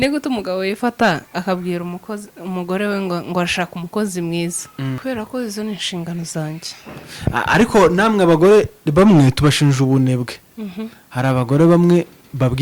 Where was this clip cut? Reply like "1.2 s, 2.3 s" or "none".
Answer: 5.0 s